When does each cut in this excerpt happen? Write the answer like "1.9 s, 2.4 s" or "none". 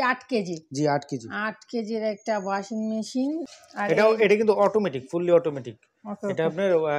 3.6 s